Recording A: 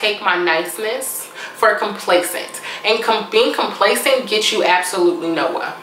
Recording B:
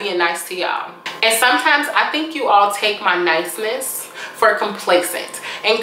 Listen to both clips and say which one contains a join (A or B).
B